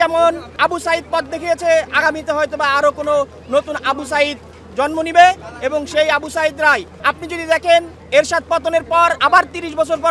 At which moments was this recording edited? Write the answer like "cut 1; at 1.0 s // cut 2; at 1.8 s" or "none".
cut 1; at 6.9 s // cut 2; at 9.2 s